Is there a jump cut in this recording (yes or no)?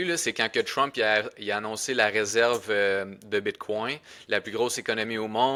no